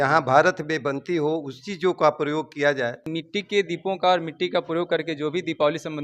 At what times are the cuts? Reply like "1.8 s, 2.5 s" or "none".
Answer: 3.1 s